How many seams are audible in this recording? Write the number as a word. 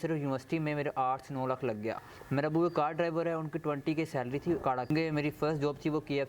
two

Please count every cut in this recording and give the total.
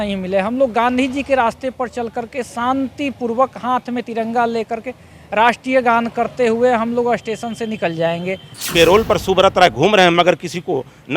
one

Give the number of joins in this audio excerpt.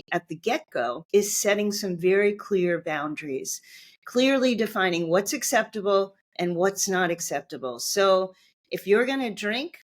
one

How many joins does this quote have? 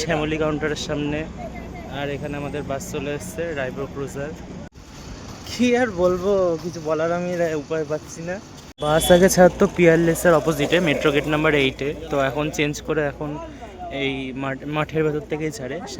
two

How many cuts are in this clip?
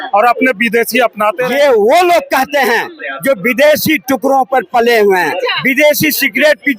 one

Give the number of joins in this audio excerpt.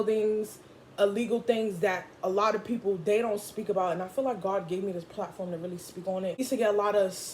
one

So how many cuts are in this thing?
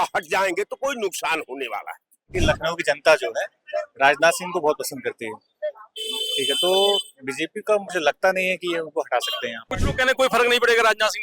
two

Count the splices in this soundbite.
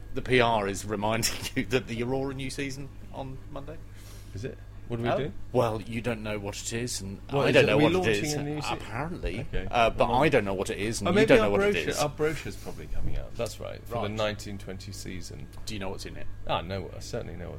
one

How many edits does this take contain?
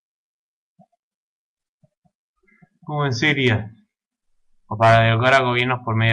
one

